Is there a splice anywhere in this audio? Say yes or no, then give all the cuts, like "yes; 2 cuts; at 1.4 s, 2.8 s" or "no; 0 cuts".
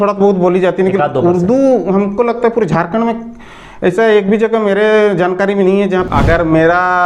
yes; 1 cut; at 6.1 s